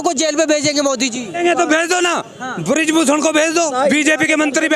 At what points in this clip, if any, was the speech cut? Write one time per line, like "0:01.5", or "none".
0:01.4
0:03.7